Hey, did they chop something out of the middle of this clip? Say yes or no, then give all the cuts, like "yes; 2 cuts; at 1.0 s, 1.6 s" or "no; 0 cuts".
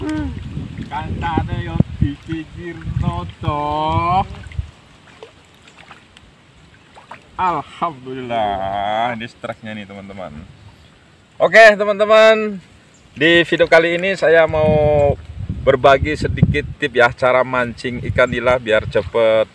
no; 0 cuts